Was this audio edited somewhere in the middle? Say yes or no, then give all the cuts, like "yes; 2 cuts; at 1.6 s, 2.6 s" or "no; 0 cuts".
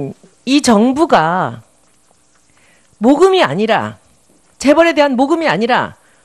yes; 1 cut; at 4.8 s